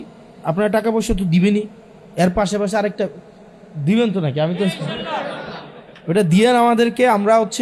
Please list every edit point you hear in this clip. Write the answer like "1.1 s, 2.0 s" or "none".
none